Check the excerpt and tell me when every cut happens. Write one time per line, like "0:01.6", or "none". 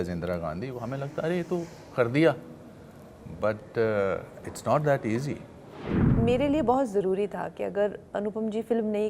0:06.0